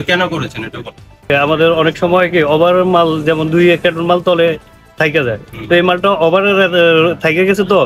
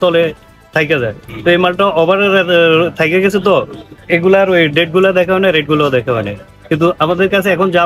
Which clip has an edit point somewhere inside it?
first; 1 cut; at 1.3 s

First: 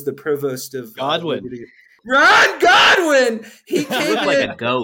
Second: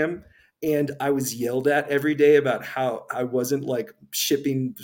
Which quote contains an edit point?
first; 1 cut; at 1.9 s

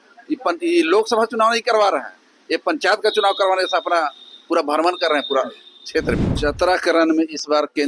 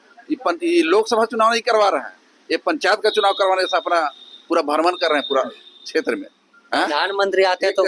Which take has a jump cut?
first; 1 cut; at 6.3 s

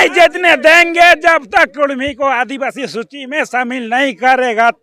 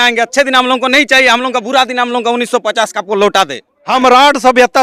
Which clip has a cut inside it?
second; 1 cut; at 3.8 s

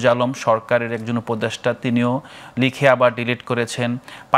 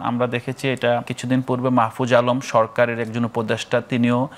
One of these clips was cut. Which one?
second; 1 cut; at 1.1 s

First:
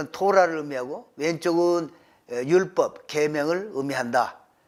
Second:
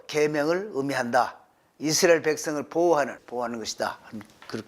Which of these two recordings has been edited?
second; 1 cut; at 3.2 s

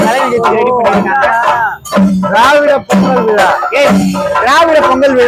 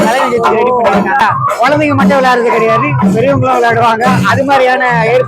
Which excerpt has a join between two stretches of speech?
second; 1 cut; at 1.2 s

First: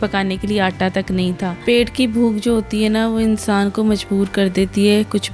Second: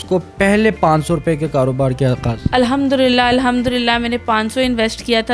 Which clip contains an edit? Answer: first; 1 cut; at 1.5 s

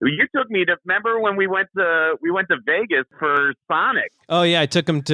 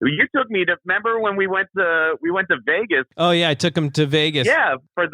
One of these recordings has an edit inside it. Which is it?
second; 1 cut; at 3.1 s

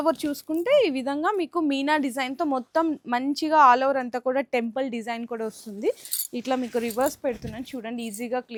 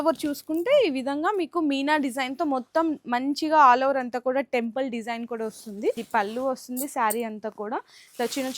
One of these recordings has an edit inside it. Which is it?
second; 1 cut; at 6.0 s

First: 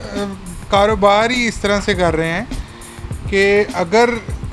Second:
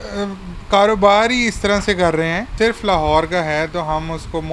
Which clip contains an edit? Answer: second; 1 cut; at 2.4 s

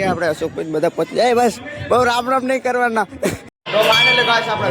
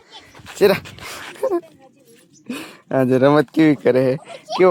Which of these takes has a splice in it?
first; 1 cut; at 3.5 s

